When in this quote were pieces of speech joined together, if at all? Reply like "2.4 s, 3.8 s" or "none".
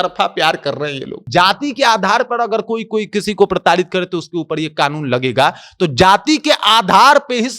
1.2 s